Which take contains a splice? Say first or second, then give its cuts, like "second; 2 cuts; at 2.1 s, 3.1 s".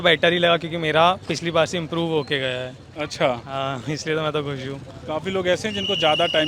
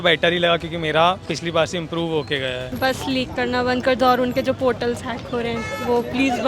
second; 1 cut; at 2.7 s